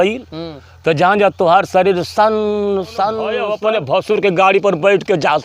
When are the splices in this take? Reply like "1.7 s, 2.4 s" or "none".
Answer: 3.5 s

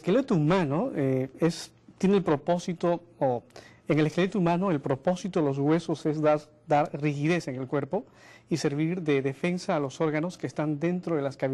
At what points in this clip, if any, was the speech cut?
5.9 s

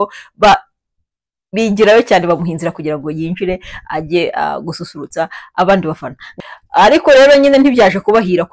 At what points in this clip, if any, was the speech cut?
6.2 s

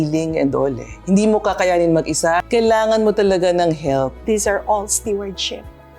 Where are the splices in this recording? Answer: 2.4 s, 4.2 s

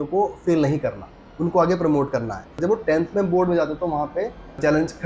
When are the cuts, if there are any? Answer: 2.6 s

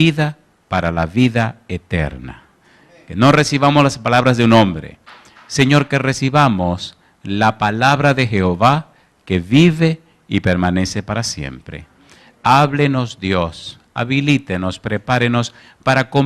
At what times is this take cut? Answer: 3.4 s

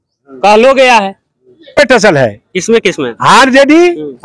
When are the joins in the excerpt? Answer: 1.8 s

